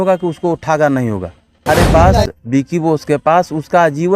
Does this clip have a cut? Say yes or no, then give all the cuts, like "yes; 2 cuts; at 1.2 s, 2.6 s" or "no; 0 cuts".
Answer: yes; 1 cut; at 1.7 s